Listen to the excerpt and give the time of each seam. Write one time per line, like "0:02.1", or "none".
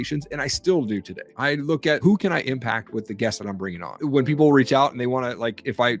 0:01.5
0:03.9